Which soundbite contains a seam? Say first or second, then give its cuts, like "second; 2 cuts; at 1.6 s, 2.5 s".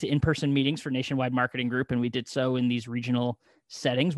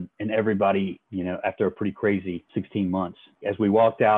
second; 3 cuts; at 1.0 s, 2.4 s, 3.4 s